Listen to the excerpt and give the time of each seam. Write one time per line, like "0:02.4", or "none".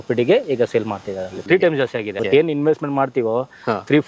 0:01.3
0:02.1